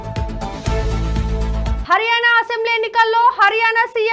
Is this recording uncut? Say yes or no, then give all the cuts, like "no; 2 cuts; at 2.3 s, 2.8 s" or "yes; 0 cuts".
no; 1 cut; at 1.8 s